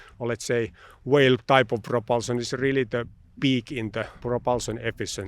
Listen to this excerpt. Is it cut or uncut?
cut